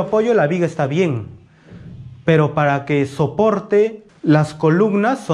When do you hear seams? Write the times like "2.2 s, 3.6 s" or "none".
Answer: 4.1 s